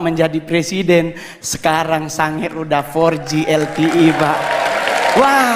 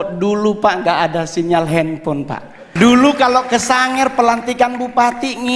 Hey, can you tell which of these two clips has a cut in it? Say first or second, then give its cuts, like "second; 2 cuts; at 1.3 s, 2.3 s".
second; 1 cut; at 2.6 s